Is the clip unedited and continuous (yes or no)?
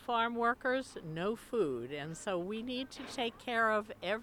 yes